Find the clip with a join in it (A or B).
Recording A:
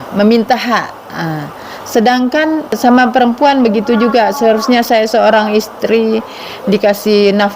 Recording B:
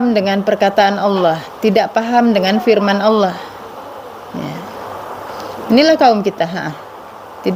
A